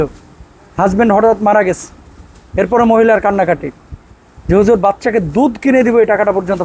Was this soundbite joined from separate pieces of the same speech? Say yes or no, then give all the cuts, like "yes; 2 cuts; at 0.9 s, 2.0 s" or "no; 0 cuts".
no; 0 cuts